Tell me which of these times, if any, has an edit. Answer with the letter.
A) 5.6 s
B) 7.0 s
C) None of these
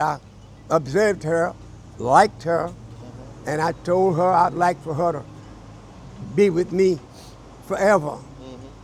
C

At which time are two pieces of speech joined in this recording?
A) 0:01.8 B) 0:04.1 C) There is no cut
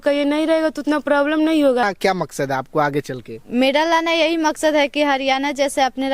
A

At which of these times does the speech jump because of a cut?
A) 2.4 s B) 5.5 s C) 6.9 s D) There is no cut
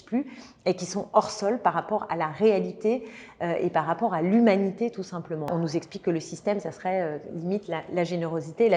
B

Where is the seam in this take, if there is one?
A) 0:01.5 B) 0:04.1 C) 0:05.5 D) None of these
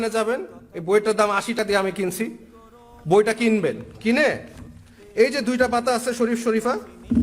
A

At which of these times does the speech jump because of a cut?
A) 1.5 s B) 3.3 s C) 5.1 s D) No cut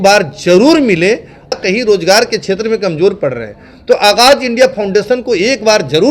A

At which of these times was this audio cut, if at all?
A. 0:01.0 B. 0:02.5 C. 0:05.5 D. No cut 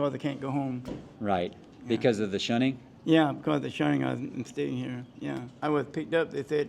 C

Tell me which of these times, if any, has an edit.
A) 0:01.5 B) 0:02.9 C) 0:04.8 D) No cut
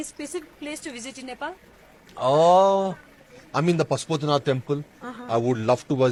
D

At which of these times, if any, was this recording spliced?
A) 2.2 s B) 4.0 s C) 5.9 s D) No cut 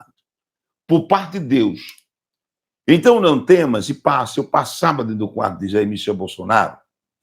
A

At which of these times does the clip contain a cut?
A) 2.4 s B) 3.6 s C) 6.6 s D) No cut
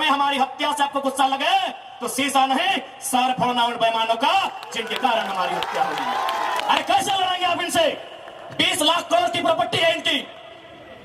C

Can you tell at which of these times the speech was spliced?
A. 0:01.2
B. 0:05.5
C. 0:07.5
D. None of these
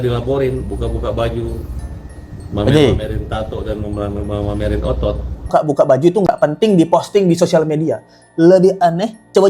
B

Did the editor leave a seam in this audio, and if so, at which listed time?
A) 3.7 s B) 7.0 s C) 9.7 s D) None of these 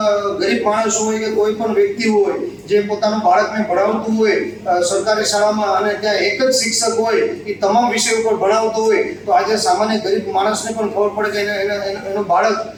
D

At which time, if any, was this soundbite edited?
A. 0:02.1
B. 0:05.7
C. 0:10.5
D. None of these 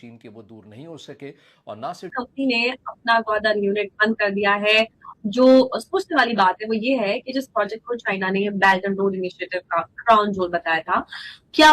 A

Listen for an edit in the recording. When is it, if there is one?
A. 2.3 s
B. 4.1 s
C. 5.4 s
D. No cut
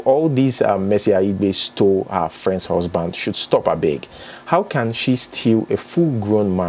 D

